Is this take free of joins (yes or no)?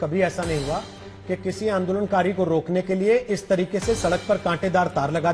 yes